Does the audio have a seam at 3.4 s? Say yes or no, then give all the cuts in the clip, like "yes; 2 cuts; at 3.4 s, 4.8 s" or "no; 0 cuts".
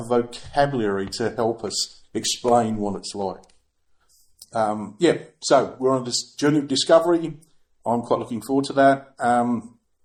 no; 0 cuts